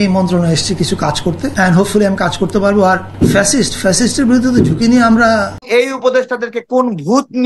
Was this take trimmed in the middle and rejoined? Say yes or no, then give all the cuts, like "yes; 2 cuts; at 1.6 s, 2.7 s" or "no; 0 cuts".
yes; 3 cuts; at 1.5 s, 3.1 s, 5.6 s